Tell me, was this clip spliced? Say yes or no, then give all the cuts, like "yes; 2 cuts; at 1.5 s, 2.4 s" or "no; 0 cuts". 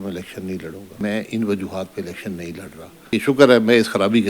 yes; 2 cuts; at 1.0 s, 3.1 s